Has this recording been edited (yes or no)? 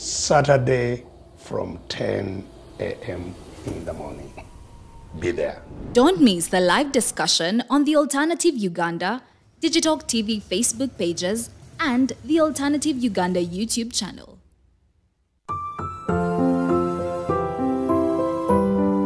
yes